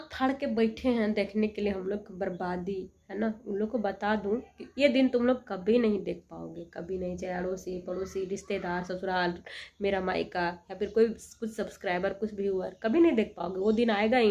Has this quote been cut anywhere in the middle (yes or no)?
no